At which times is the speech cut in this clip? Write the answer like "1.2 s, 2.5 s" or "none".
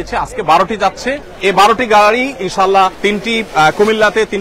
1.2 s, 3.0 s